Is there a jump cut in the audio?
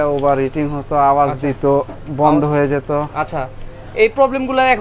no; 0 cuts

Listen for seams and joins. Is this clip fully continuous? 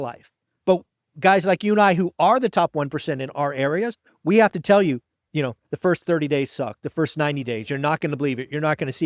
no; 1 cut; at 5.1 s

